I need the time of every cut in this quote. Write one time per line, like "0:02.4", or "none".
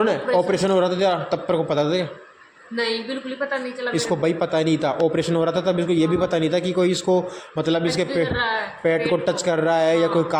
none